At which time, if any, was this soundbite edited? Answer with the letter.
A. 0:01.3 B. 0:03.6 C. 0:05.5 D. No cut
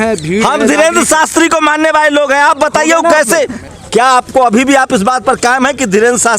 B